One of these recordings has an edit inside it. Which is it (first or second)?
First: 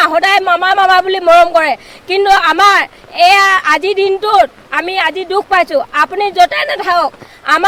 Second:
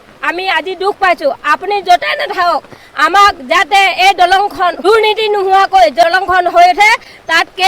second